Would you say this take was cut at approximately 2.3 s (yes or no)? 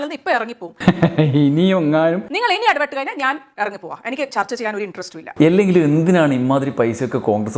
yes